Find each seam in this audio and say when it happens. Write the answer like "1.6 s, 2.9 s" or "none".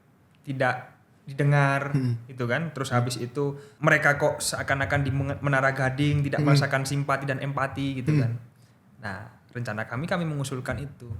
3.7 s